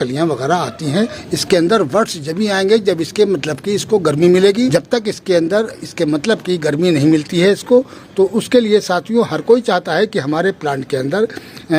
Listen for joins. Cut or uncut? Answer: cut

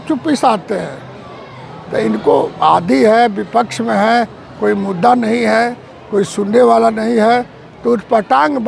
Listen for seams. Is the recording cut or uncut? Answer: uncut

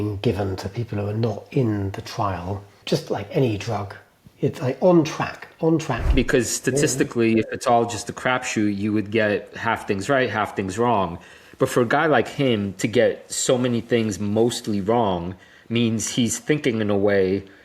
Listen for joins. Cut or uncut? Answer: cut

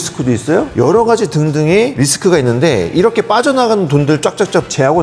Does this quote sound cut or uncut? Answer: uncut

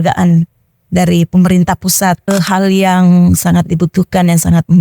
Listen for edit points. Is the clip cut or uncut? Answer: cut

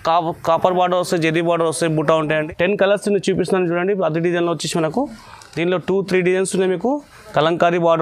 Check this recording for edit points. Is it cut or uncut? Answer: cut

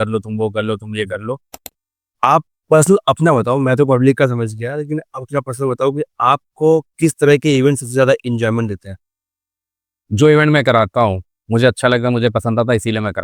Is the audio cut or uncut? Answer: cut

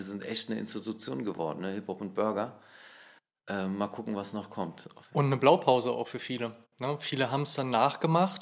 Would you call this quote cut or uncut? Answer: uncut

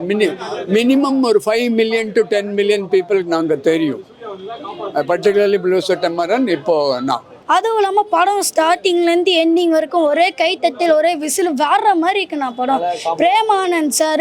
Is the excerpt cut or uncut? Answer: cut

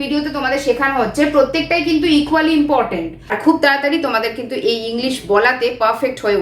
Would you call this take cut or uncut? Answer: cut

